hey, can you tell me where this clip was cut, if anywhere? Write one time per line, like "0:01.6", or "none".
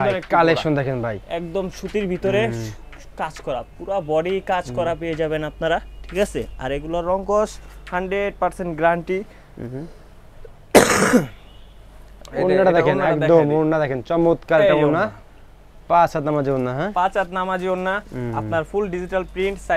none